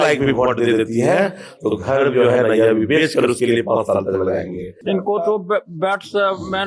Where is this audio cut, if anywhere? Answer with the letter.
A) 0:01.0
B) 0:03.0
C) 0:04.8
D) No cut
C